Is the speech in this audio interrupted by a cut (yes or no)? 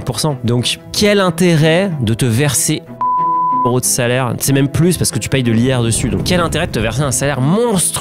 no